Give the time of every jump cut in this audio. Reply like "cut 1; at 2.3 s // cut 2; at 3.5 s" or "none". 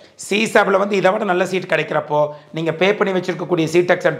none